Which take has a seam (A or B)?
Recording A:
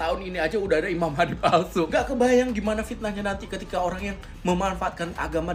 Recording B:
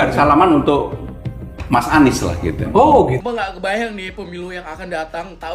B